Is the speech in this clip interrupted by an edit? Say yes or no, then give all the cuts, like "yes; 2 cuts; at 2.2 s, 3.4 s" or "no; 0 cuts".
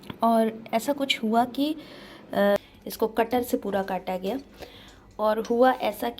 yes; 1 cut; at 2.6 s